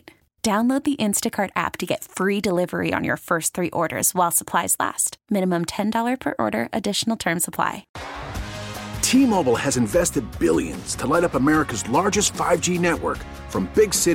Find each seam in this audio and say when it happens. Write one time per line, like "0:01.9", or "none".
0:07.9